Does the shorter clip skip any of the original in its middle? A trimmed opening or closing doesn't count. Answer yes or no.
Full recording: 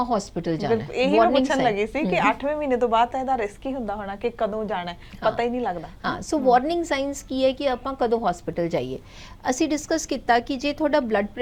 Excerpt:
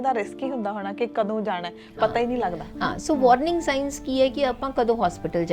no